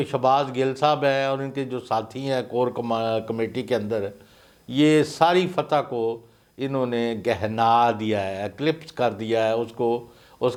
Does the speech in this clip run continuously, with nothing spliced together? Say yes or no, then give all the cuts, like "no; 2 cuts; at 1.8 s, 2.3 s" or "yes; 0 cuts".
yes; 0 cuts